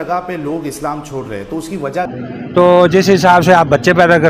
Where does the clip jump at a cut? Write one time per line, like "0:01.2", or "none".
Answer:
0:02.1